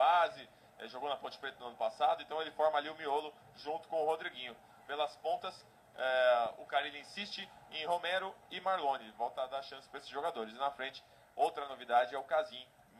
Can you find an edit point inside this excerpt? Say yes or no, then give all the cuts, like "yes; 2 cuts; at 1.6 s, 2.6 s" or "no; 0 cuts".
no; 0 cuts